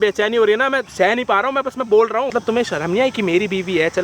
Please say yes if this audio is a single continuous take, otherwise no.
no